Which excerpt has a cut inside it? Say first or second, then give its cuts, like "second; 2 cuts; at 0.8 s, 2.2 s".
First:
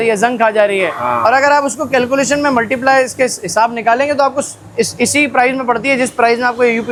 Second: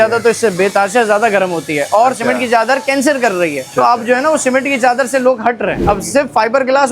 second; 2 cuts; at 3.6 s, 5.8 s